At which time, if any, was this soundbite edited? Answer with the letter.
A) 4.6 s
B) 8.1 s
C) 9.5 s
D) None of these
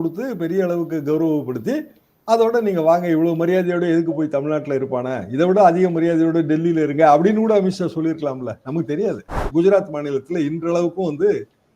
C